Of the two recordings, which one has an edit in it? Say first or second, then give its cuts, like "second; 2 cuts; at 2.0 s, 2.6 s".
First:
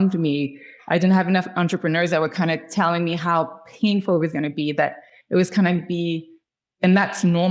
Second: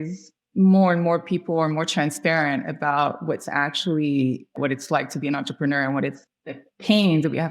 second; 2 cuts; at 4.5 s, 6.3 s